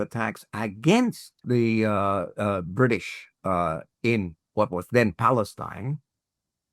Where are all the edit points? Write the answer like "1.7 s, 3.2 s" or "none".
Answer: 1.4 s, 4.4 s